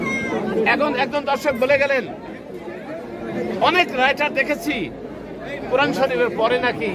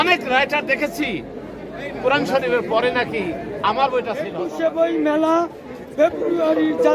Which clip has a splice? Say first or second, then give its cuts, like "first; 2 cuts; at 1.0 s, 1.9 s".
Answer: second; 1 cut; at 4.4 s